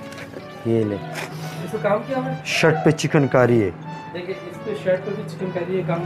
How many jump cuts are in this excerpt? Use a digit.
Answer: 1